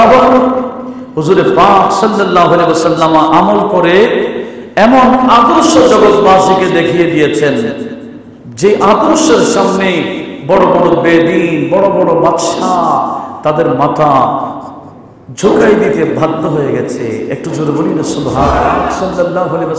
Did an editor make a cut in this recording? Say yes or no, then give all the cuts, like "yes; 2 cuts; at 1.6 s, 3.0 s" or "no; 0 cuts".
yes; 1 cut; at 18.7 s